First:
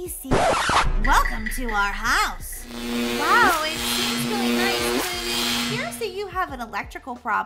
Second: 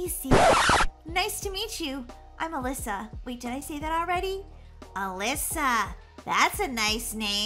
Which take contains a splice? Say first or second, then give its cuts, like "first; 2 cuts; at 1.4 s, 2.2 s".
first; 1 cut; at 0.9 s